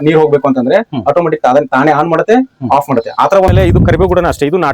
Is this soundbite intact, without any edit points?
no; 1 cut; at 3.5 s

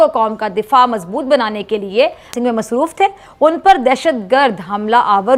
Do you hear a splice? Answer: no; 0 cuts

